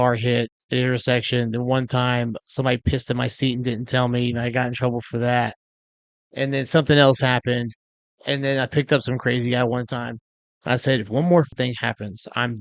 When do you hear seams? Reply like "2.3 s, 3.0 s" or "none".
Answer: 11.5 s